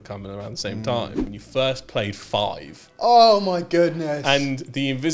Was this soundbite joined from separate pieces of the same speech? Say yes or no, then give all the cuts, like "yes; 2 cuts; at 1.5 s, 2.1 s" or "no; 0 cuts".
yes; 1 cut; at 1.2 s